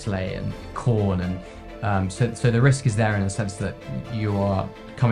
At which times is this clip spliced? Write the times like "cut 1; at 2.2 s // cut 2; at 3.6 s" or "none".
none